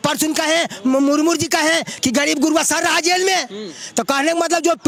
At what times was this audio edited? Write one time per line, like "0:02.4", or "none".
none